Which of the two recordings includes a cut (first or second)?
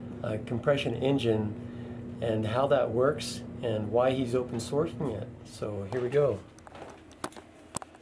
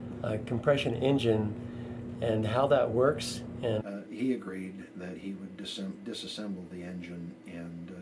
first